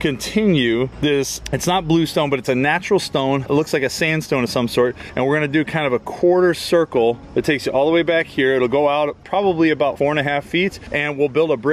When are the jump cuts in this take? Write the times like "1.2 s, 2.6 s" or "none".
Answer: 9.9 s